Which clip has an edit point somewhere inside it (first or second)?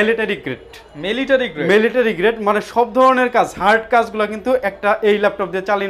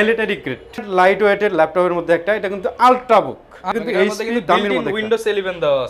second